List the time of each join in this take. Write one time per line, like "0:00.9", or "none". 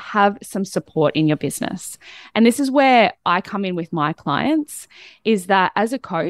none